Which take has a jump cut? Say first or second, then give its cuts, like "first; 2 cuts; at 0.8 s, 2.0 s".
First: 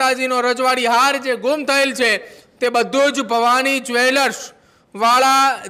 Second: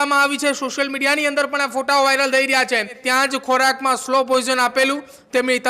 second; 1 cut; at 3.0 s